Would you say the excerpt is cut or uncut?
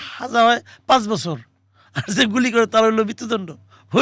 uncut